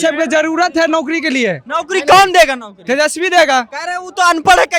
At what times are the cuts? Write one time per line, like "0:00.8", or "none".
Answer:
none